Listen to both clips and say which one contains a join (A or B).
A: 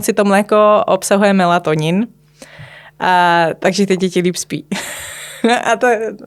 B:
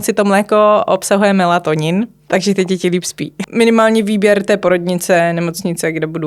B